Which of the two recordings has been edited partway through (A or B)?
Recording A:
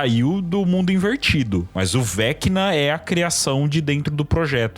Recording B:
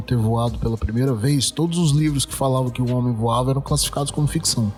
A